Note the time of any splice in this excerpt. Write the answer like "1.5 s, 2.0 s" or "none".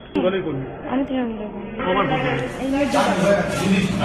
3.0 s